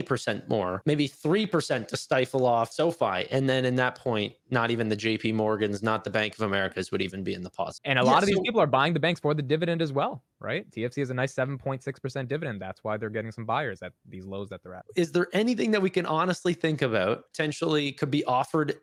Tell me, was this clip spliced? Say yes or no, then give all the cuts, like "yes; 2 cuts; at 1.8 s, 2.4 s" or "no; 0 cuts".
no; 0 cuts